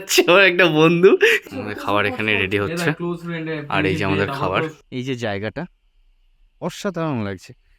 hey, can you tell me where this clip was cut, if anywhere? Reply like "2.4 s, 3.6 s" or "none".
1.4 s, 4.8 s